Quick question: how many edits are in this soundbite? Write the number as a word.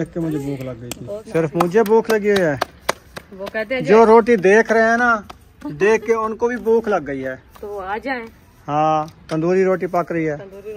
one